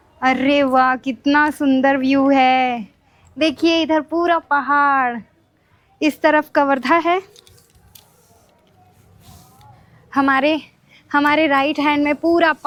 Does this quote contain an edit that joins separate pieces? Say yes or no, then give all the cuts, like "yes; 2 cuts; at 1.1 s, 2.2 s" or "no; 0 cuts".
no; 0 cuts